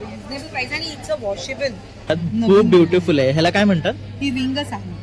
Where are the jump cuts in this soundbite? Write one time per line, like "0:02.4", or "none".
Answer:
0:02.1